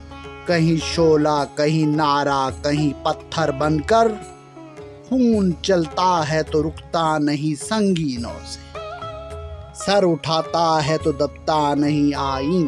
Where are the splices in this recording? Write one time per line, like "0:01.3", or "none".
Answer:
0:08.4
0:09.8